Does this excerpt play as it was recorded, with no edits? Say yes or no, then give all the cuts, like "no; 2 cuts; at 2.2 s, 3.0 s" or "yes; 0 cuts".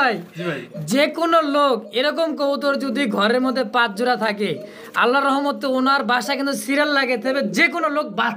yes; 0 cuts